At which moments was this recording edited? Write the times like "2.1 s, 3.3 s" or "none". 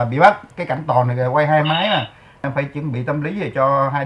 2.5 s